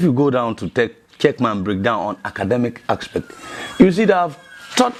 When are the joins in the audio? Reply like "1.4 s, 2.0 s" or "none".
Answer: none